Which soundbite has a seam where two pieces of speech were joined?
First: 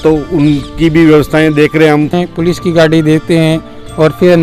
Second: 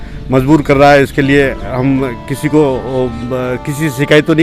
first; 1 cut; at 2.1 s

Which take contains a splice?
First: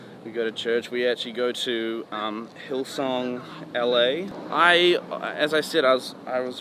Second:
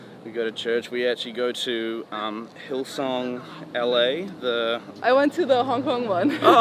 first; 1 cut; at 4.3 s

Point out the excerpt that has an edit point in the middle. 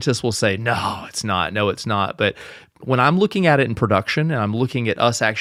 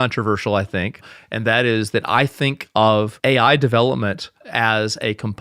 second; 1 cut; at 3.1 s

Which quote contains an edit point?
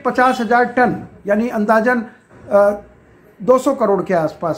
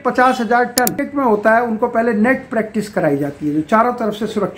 second; 1 cut; at 1.0 s

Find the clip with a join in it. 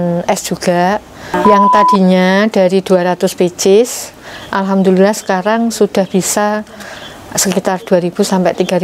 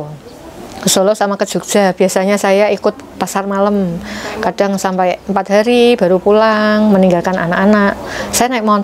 first; 1 cut; at 1.3 s

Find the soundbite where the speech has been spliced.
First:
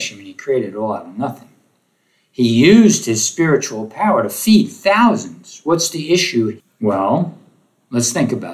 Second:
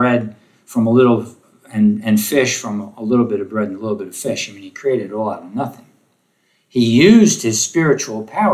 first; 1 cut; at 6.6 s

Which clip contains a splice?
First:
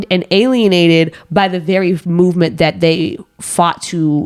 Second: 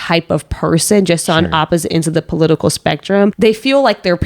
second; 1 cut; at 3.3 s

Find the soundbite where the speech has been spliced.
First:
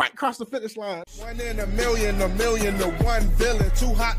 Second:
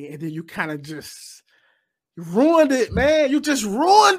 first; 1 cut; at 1.1 s

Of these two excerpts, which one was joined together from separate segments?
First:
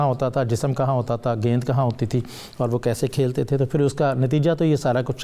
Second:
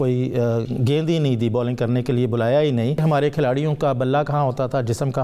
second; 1 cut; at 3.0 s

